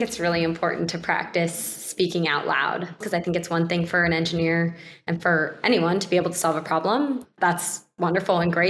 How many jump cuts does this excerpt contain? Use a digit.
2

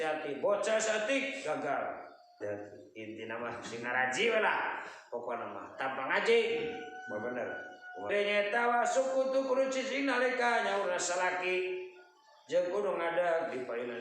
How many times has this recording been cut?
2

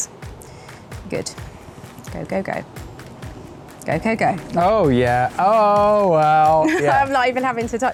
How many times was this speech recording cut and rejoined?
0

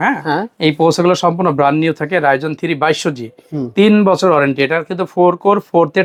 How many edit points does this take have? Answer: 0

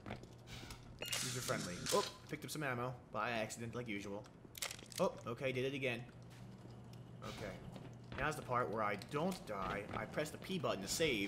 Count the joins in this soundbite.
1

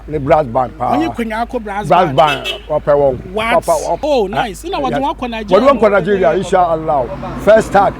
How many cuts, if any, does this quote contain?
1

